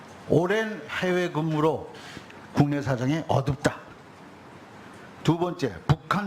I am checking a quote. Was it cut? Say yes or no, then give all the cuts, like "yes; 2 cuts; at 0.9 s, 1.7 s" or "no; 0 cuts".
yes; 1 cut; at 4.9 s